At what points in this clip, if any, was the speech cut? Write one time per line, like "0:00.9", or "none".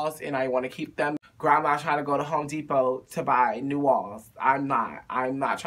0:01.2